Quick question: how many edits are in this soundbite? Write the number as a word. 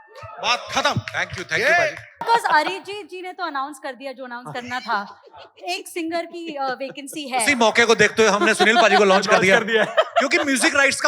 one